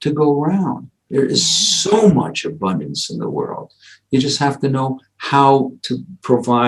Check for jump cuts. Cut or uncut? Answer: uncut